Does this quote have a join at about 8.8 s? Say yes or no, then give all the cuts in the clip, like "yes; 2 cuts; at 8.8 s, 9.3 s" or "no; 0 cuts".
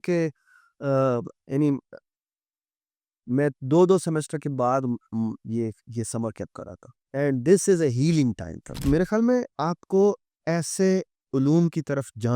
yes; 1 cut; at 8.8 s